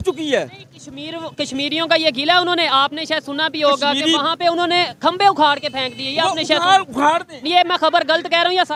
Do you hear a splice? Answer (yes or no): no